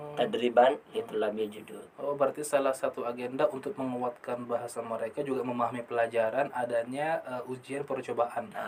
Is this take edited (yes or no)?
no